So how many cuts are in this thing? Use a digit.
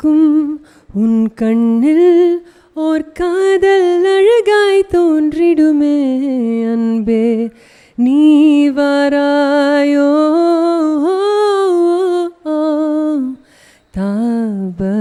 0